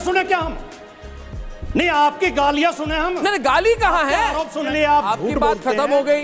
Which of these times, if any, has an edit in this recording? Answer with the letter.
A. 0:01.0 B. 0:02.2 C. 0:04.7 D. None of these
C